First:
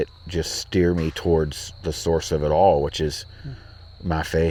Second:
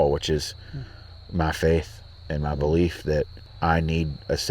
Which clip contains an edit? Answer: second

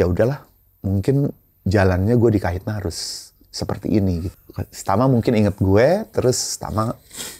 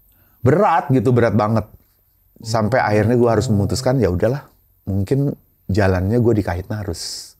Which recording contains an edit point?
first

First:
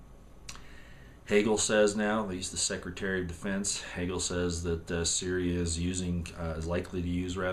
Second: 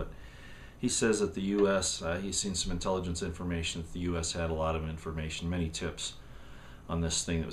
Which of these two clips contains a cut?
second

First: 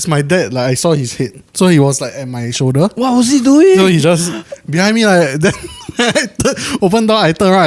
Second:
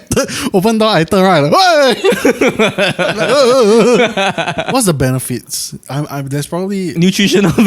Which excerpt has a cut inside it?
second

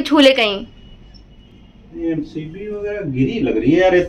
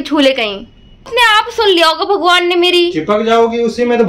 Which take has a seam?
second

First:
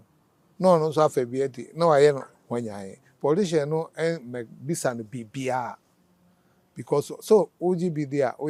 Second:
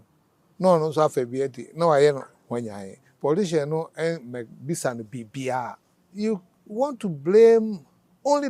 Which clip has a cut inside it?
second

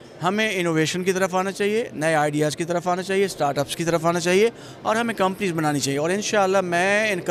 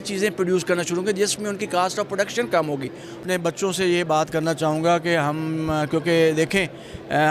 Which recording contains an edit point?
second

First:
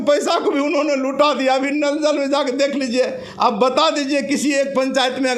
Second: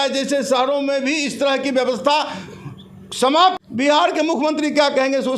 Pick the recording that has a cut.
second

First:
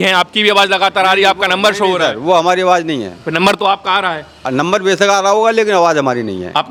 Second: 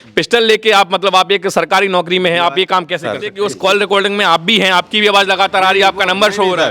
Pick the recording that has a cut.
second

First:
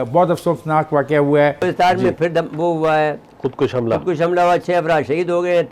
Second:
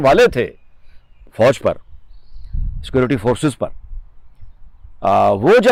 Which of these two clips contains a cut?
first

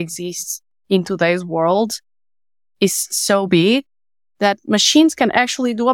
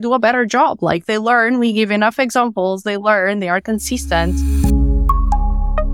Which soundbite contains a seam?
second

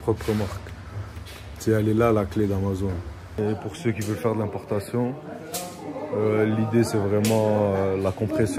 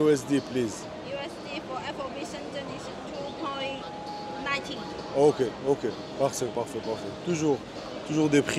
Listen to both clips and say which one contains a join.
first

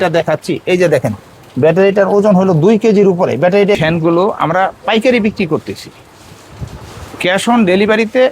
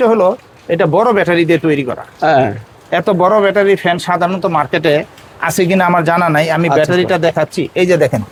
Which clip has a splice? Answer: first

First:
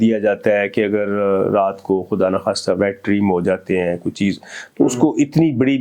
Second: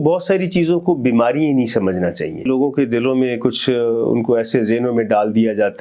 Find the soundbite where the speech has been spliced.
second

